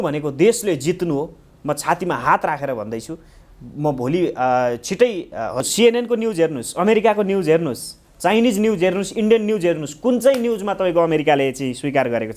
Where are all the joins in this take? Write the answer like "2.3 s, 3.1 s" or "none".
5.7 s